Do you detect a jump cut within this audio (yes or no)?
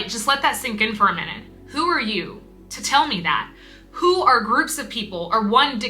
no